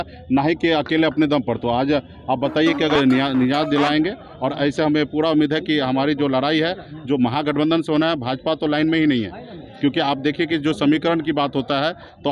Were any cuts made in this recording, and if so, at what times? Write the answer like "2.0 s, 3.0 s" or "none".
2.9 s

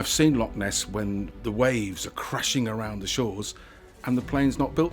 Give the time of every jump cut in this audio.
1.3 s

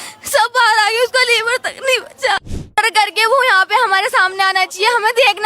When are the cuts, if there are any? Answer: 2.7 s

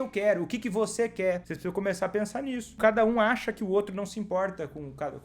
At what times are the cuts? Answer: 1.5 s, 2.8 s

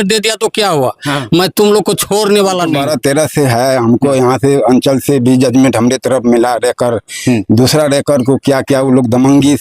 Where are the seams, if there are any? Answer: 2.8 s

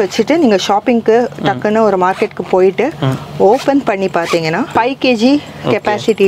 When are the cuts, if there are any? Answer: 4.7 s

